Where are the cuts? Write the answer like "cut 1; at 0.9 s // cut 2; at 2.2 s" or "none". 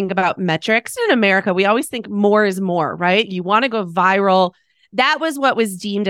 cut 1; at 1.0 s // cut 2; at 3.3 s